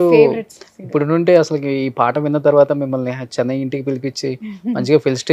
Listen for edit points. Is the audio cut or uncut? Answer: uncut